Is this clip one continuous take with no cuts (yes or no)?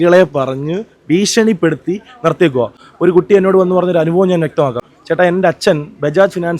no